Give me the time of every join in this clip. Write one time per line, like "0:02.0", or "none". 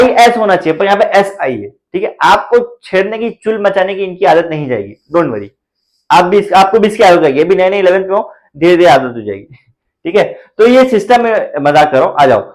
none